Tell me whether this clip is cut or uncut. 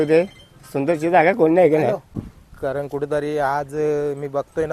cut